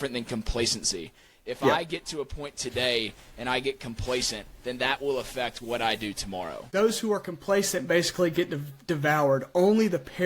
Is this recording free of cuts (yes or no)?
no